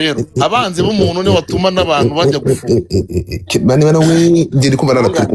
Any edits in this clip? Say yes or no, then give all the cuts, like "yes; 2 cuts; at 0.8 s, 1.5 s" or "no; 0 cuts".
no; 0 cuts